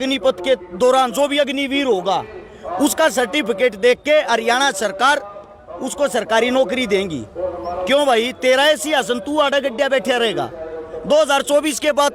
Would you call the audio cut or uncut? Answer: uncut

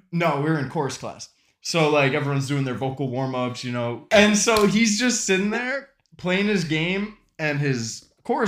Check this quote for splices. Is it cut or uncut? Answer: cut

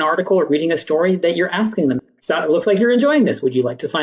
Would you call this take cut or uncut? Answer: cut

